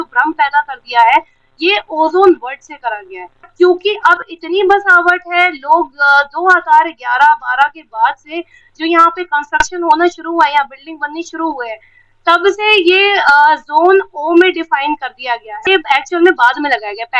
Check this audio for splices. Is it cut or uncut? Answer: cut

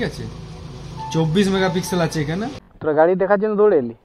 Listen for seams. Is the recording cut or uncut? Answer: cut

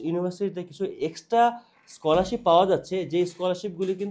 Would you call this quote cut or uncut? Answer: uncut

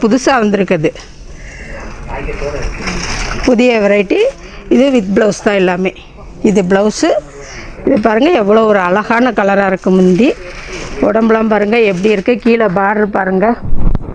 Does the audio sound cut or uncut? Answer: uncut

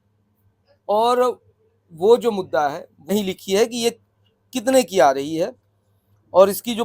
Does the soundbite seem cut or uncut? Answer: cut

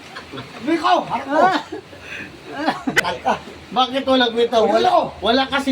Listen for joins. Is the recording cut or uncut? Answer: cut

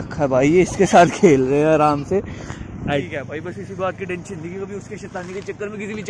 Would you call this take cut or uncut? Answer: cut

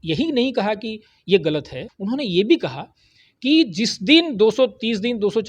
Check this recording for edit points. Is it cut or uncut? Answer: cut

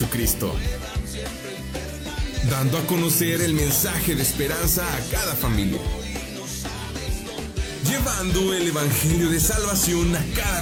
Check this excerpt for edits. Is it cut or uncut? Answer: uncut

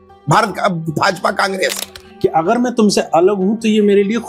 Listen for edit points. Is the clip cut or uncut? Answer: cut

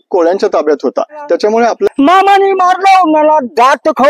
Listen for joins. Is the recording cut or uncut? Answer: cut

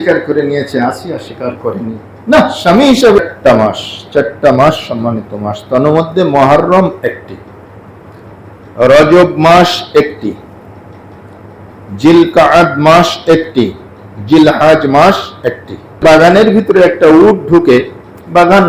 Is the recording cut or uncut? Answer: cut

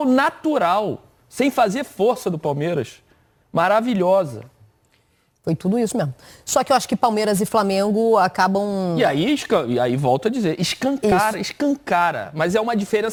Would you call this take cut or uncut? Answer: uncut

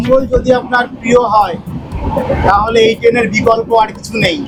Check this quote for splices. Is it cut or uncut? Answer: uncut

